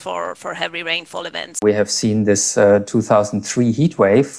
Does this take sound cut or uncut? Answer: cut